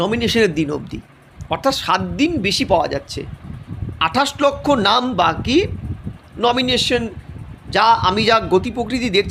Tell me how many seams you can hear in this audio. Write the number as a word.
zero